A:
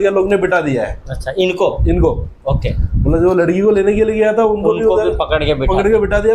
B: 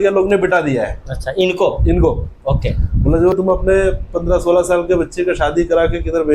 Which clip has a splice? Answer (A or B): B